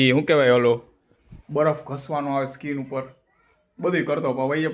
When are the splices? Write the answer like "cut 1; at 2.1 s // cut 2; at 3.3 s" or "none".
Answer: none